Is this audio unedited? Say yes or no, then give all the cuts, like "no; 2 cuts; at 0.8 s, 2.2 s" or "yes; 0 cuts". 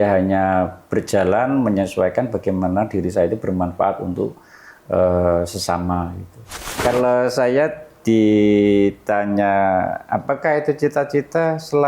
no; 1 cut; at 6.6 s